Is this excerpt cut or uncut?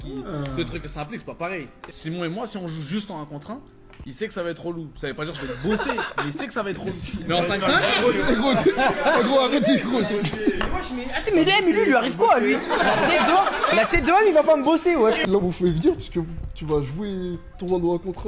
cut